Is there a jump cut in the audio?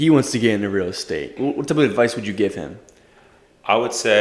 yes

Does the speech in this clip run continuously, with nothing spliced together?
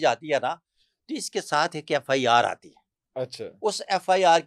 yes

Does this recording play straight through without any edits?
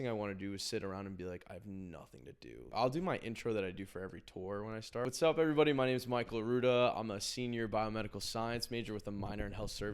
no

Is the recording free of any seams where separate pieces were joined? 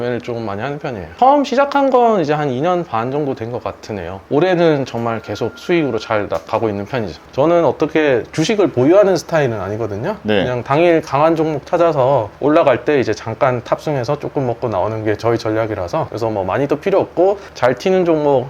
no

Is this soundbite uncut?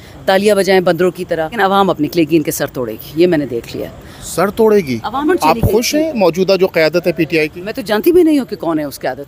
no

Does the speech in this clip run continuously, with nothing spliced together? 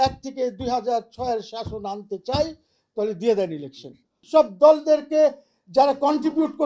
no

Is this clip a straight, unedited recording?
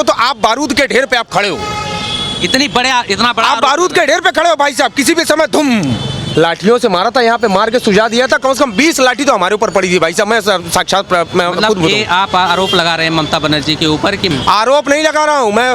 no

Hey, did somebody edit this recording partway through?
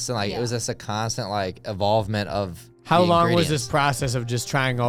no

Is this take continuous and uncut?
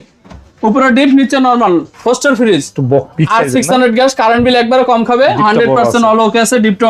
yes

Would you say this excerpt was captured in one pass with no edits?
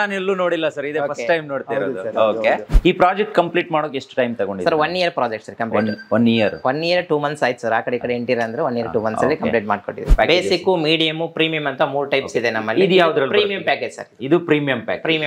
no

